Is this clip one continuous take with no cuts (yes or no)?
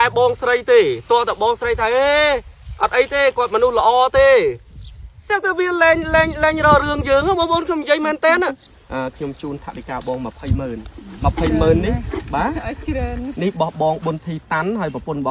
no